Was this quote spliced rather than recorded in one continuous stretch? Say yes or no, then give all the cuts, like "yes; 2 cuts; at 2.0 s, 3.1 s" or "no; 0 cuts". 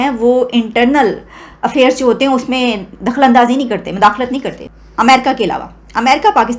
no; 0 cuts